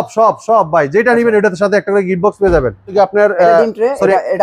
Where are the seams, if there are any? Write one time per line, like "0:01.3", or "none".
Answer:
0:02.9